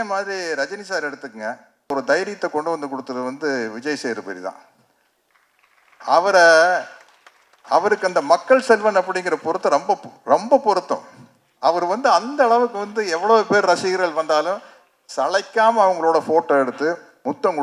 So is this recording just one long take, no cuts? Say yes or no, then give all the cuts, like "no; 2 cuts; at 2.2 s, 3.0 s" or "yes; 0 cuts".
no; 1 cut; at 1.9 s